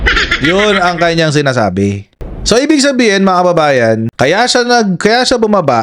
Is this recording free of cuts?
no; 1 cut; at 2.1 s

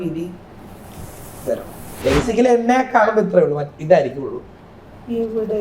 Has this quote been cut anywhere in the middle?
yes; 1 cut; at 1.8 s

